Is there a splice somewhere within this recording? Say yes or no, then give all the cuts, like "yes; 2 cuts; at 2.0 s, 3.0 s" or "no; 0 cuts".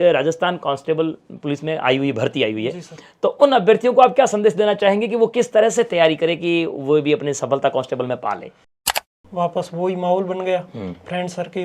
yes; 1 cut; at 8.9 s